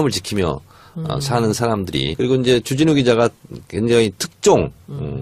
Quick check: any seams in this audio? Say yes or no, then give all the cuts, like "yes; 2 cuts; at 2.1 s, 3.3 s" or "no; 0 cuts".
no; 0 cuts